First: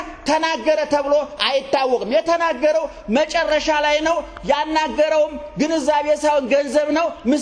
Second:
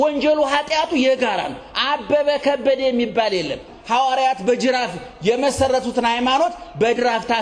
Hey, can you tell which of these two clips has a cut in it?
second; 1 cut; at 3.7 s

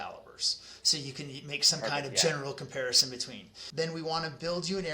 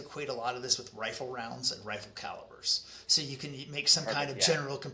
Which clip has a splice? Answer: first; 1 cut; at 3.6 s

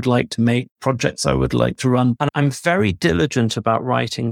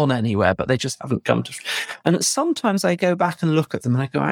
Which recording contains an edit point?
first; 1 cut; at 2.2 s

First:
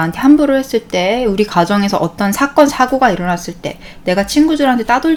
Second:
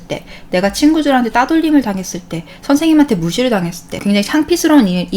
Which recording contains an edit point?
second; 1 cut; at 3.9 s

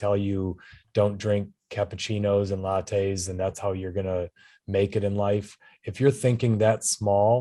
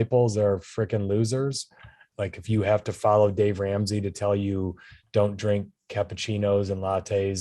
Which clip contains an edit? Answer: second; 1 cut; at 2.0 s

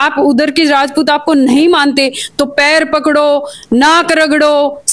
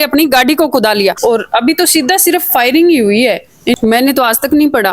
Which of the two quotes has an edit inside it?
second; 2 cuts; at 1.2 s, 3.7 s

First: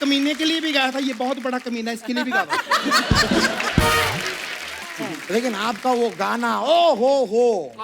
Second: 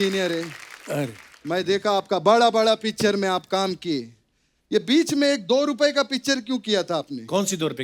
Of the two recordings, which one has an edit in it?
first; 1 cut; at 4.9 s

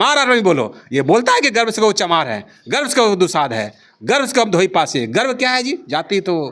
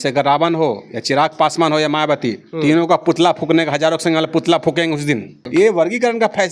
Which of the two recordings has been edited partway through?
second; 1 cut; at 5.4 s

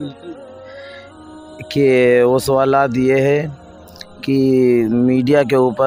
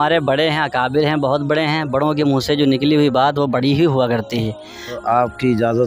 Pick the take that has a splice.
second; 1 cut; at 4.9 s

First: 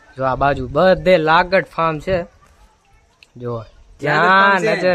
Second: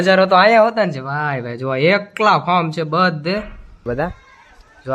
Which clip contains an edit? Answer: second; 1 cut; at 3.8 s

